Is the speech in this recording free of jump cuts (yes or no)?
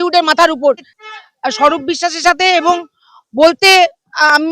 no